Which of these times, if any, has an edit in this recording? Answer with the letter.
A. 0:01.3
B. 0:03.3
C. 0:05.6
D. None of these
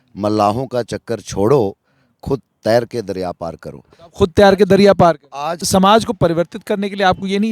C